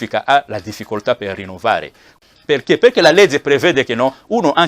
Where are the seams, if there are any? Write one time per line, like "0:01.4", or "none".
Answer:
0:02.2

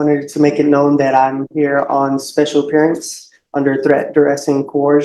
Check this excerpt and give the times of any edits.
none

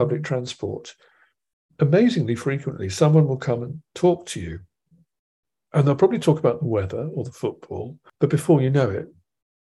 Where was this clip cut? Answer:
0:08.0

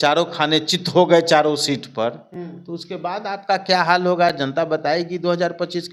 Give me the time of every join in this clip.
none

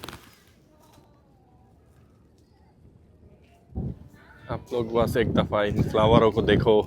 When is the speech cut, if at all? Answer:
0:03.7

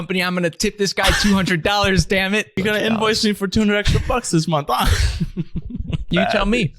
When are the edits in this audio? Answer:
0:02.6
0:06.1

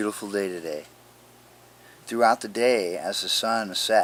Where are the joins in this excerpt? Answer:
none

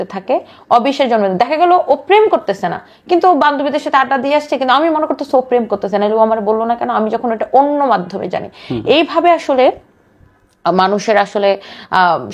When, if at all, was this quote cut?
none

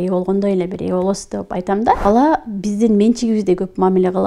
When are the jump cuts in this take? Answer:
0:02.0

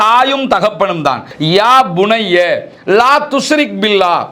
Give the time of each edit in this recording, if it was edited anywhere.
0:01.3

